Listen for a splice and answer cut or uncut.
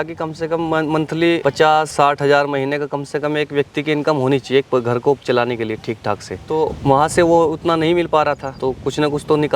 cut